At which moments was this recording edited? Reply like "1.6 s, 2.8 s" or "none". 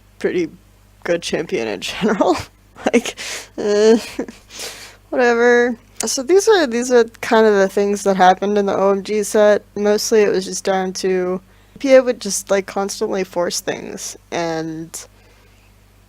10.3 s